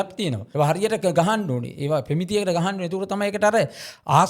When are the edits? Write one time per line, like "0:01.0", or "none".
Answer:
none